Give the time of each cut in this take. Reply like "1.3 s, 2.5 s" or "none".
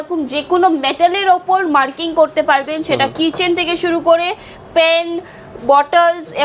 none